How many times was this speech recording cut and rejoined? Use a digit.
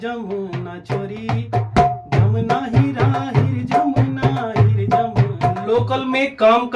1